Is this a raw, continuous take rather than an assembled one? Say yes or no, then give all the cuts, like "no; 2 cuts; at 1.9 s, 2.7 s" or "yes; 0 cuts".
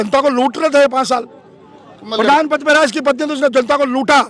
yes; 0 cuts